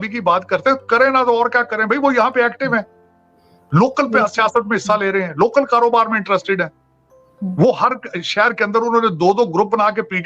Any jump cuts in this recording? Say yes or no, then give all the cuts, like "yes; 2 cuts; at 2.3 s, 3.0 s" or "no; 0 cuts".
no; 0 cuts